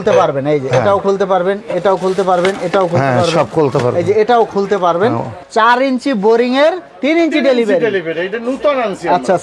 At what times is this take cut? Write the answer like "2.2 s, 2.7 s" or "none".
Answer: 5.3 s